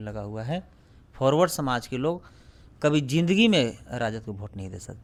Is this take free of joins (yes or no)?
yes